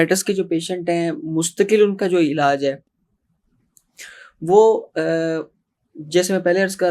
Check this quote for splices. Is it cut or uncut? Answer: uncut